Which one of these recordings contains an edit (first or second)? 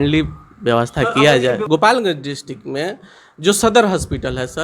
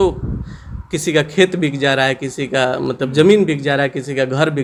first